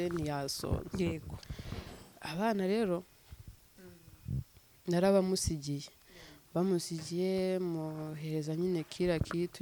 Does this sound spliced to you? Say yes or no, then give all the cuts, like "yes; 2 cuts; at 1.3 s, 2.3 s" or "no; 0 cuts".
no; 0 cuts